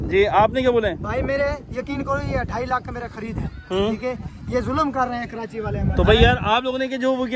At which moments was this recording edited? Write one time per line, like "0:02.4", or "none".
none